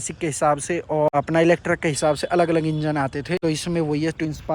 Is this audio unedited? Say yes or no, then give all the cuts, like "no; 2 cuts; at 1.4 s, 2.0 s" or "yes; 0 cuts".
no; 2 cuts; at 1.1 s, 3.4 s